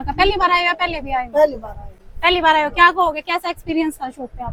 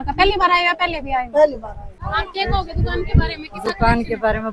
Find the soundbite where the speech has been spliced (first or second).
second